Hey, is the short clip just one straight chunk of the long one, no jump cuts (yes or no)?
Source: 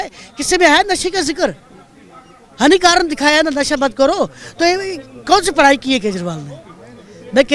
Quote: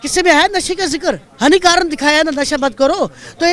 no